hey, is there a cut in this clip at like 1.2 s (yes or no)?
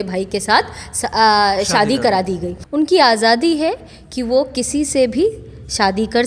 no